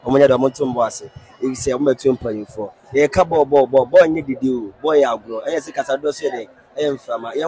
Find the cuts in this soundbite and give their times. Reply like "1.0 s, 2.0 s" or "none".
none